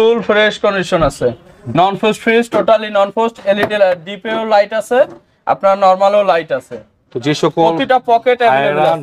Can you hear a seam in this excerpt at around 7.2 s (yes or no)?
no